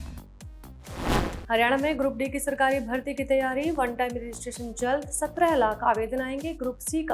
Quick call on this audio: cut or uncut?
cut